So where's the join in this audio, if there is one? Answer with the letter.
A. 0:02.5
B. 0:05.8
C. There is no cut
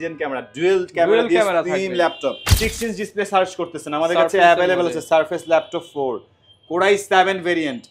A